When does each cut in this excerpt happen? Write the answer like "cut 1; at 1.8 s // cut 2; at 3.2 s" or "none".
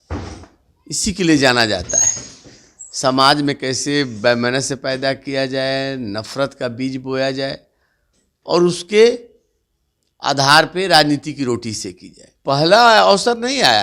cut 1; at 12.4 s